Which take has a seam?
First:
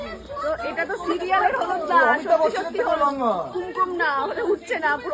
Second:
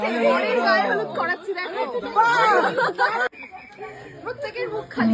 second; 1 cut; at 3.3 s

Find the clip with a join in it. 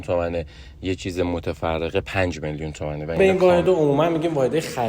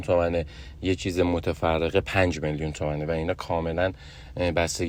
first; 1 cut; at 3.2 s

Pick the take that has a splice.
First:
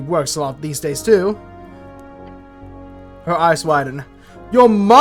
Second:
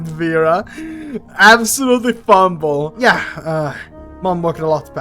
second; 1 cut; at 2.9 s

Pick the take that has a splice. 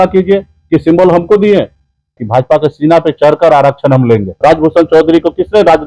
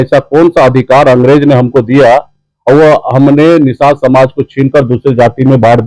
first; 2 cuts; at 2.2 s, 4.4 s

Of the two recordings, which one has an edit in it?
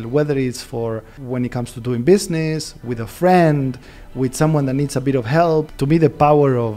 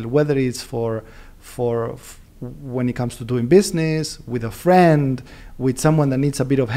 first; 2 cuts; at 1.1 s, 5.7 s

